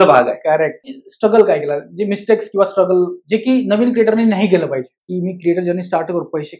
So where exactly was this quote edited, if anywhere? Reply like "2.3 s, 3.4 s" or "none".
1.0 s, 5.0 s